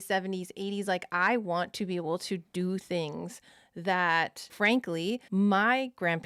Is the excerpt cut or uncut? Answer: uncut